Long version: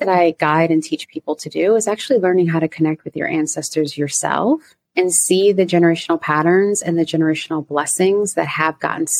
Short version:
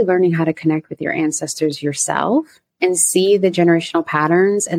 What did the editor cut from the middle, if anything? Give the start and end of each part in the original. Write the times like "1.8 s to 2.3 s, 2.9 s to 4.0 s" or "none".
none